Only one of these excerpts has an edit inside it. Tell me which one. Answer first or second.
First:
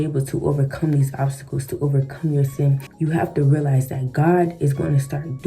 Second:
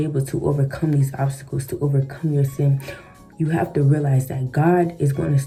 first